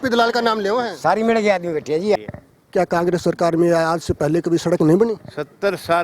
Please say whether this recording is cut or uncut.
cut